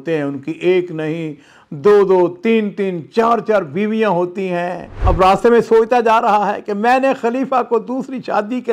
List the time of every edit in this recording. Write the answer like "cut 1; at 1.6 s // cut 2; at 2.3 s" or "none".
cut 1; at 4.9 s